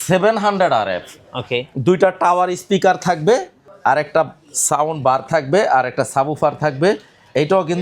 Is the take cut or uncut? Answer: uncut